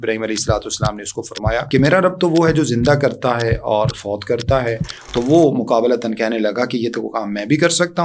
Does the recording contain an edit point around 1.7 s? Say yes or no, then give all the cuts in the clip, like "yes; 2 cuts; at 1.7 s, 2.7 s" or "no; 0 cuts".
yes; 1 cut; at 1.7 s